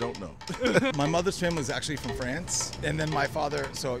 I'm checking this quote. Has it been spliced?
yes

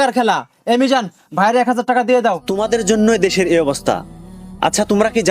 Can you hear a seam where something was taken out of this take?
yes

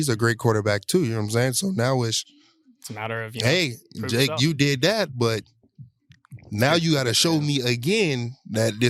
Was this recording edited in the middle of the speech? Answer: no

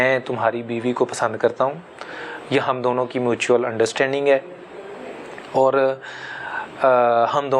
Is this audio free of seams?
yes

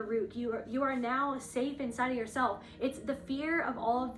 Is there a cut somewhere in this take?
no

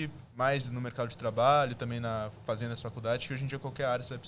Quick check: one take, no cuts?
yes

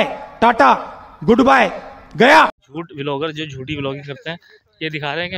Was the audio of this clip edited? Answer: yes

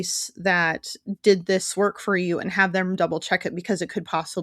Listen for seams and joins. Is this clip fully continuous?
yes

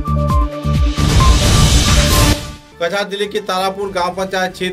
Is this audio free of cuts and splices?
no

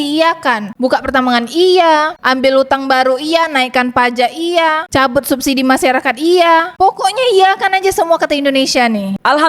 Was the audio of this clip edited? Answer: no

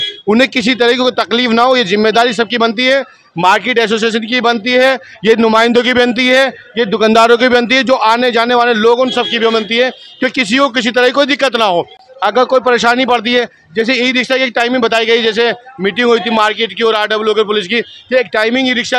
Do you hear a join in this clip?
no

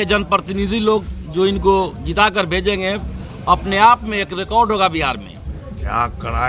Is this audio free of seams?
no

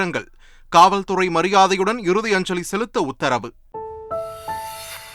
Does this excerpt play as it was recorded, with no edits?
no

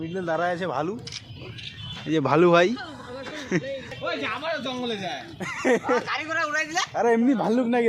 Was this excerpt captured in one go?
no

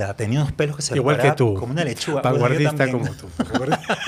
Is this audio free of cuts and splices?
yes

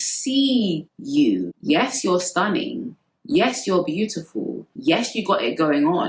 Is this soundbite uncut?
no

